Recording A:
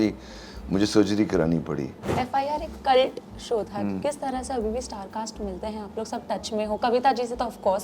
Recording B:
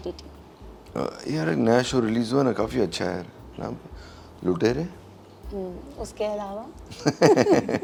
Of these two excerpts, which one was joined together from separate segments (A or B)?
A